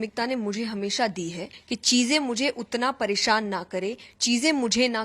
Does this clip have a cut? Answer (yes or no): yes